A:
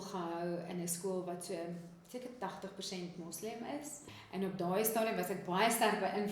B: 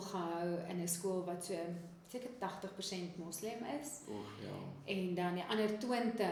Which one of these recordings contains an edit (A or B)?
A